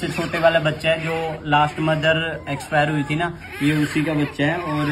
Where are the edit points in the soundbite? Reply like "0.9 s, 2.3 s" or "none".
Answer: none